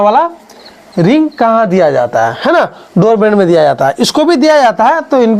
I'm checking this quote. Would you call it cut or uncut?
uncut